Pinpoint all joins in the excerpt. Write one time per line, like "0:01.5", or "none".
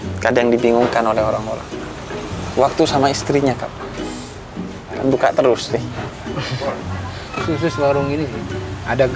0:07.4